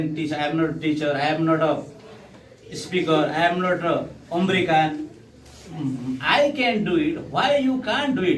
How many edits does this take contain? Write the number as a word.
zero